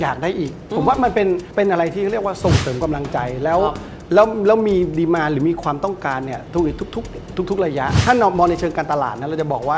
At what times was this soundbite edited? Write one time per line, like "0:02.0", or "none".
0:01.5
0:07.9